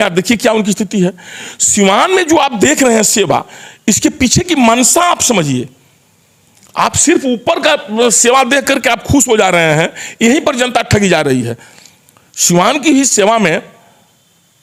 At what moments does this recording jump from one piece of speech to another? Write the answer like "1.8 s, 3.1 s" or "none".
none